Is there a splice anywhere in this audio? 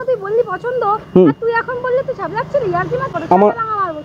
yes; 1 cut; at 3.1 s

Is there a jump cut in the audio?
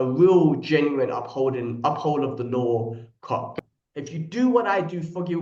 yes; 1 cut; at 3.5 s

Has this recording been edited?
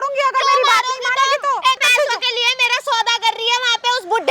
yes; 1 cut; at 1.8 s

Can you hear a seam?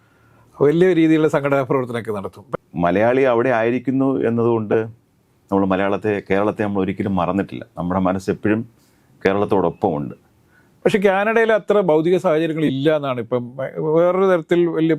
yes; 2 cuts; at 2.5 s, 10.7 s

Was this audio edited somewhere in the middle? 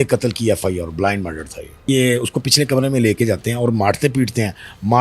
yes; 1 cut; at 1.8 s

